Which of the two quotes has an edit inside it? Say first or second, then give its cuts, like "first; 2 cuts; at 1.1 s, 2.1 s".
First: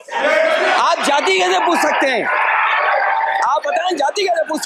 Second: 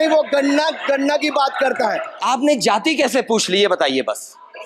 second; 1 cut; at 2.1 s